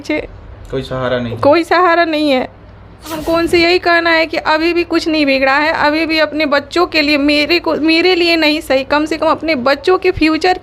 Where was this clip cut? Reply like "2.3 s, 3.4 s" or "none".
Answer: 3.2 s